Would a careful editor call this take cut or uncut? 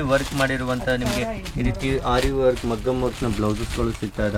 uncut